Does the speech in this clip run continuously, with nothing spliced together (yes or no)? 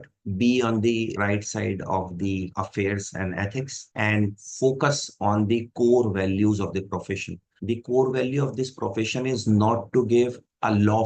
yes